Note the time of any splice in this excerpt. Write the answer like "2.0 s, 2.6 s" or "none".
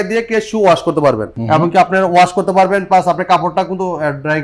1.3 s